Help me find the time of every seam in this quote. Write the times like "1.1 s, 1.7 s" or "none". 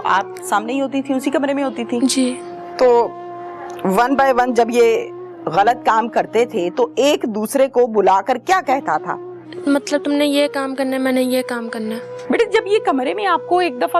2.7 s, 9.5 s, 12.2 s